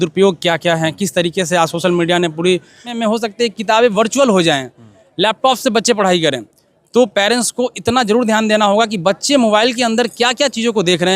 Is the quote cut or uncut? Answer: cut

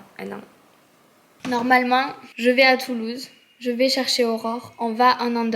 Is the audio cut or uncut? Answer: uncut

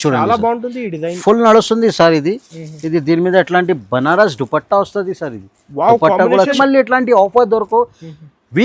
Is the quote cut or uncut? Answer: cut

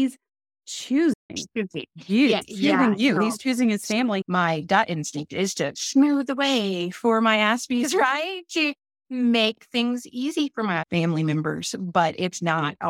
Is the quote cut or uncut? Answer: cut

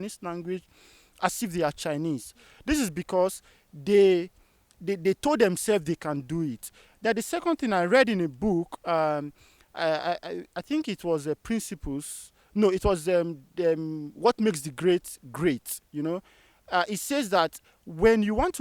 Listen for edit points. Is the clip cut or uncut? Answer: uncut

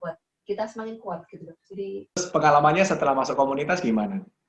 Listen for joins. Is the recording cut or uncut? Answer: cut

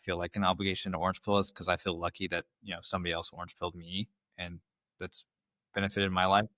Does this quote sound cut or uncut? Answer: uncut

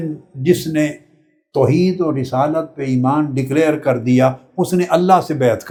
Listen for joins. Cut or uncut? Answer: uncut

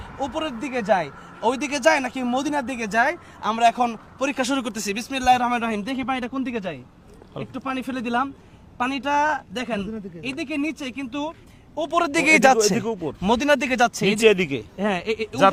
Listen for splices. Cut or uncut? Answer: uncut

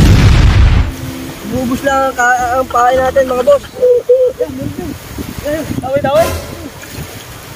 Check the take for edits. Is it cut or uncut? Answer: cut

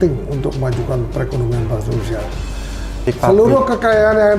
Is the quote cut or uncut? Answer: cut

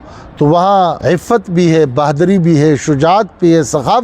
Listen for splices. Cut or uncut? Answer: cut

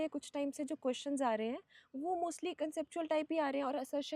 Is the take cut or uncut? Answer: uncut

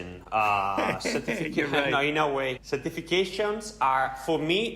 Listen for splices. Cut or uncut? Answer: cut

